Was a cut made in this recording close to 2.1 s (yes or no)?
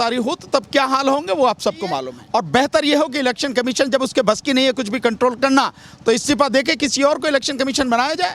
yes